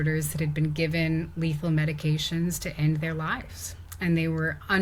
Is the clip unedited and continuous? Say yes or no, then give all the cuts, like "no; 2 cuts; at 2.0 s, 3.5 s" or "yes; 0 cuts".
yes; 0 cuts